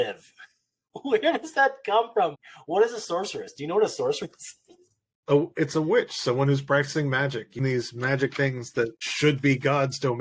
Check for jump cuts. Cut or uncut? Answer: cut